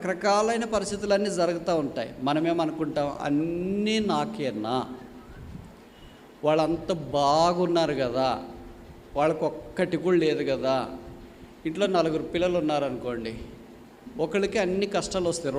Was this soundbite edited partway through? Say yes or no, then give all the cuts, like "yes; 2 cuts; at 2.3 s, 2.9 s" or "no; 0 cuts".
no; 0 cuts